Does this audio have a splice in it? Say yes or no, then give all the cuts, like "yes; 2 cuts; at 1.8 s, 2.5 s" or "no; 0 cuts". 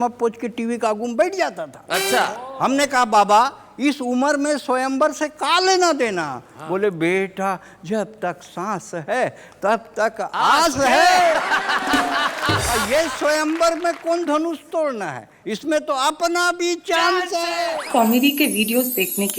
yes; 2 cuts; at 12.7 s, 17.6 s